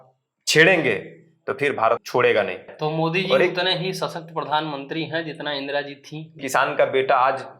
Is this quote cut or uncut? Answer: cut